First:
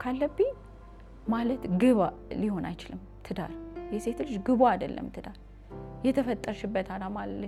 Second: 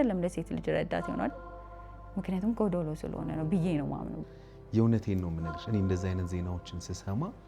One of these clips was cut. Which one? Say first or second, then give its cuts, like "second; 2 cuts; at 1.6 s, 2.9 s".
second; 1 cut; at 4.2 s